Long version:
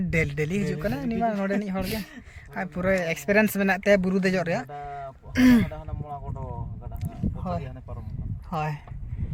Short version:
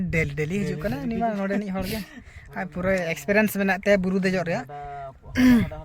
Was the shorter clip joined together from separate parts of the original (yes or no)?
no